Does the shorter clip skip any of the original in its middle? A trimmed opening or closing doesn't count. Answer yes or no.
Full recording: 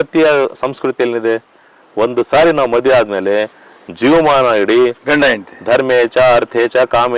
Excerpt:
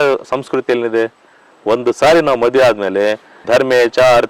yes